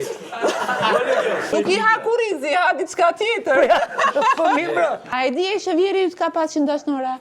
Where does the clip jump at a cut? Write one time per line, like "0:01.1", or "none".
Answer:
0:01.5
0:05.0